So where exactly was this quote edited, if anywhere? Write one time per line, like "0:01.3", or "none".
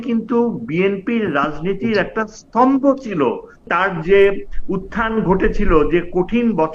0:03.6